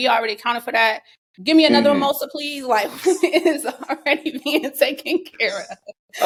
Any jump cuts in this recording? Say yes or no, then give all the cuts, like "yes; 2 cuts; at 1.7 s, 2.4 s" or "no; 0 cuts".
no; 0 cuts